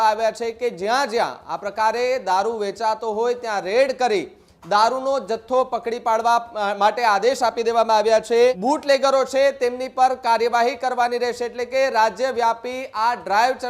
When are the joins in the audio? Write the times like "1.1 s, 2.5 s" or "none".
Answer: 8.6 s